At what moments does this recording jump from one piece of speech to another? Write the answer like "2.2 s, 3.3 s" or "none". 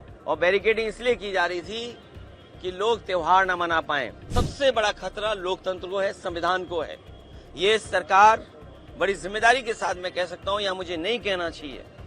4.2 s